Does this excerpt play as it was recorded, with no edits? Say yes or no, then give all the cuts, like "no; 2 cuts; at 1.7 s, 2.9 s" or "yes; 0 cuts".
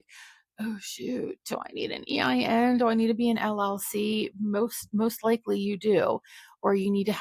yes; 0 cuts